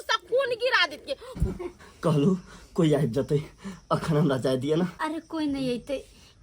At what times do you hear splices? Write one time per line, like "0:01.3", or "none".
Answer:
0:01.4